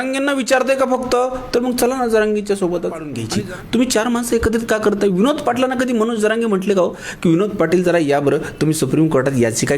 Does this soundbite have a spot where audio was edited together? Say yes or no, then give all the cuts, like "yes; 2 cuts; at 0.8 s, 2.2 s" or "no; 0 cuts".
yes; 1 cut; at 3.2 s